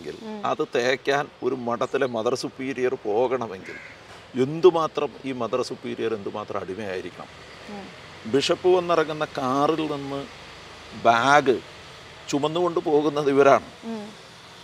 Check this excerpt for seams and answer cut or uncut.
uncut